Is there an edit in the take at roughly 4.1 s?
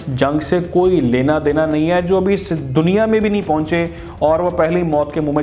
no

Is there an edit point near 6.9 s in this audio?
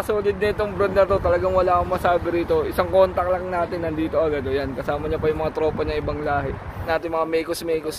yes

